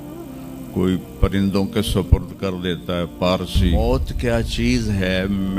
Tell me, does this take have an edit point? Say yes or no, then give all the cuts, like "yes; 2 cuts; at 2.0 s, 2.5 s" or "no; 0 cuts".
yes; 1 cut; at 3.8 s